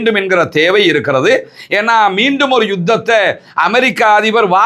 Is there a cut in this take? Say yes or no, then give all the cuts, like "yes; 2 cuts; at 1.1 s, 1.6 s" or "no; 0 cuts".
no; 0 cuts